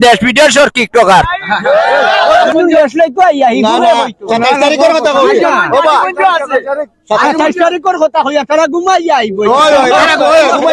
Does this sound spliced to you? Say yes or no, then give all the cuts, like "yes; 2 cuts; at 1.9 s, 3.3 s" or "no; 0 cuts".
yes; 1 cut; at 2.5 s